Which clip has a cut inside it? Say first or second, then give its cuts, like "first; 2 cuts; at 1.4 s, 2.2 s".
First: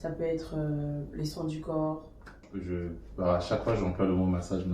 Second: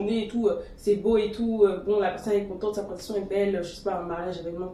first; 1 cut; at 2.5 s